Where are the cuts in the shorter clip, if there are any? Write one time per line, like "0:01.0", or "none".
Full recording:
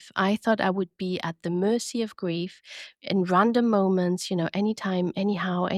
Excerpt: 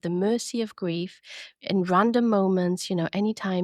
none